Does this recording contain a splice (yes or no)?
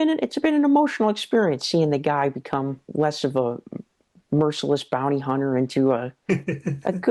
no